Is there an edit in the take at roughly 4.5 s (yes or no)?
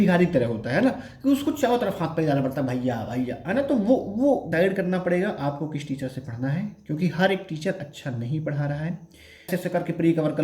yes